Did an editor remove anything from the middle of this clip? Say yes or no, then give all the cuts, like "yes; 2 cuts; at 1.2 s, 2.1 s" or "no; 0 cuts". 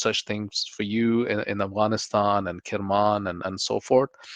no; 0 cuts